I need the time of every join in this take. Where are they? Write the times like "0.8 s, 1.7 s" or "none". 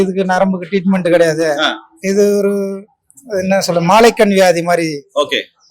none